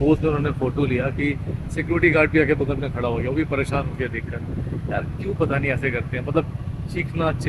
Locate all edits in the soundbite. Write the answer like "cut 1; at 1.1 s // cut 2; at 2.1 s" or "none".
none